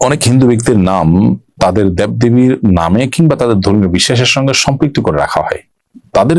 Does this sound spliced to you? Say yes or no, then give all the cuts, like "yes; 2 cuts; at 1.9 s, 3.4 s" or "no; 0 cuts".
no; 0 cuts